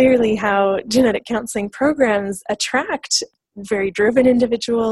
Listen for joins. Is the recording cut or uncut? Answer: uncut